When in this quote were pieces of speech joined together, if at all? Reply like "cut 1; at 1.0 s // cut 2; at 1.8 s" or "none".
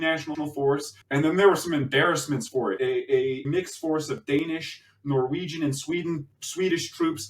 cut 1; at 1.0 s // cut 2; at 3.5 s